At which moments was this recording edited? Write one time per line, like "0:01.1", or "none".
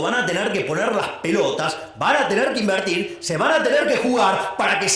none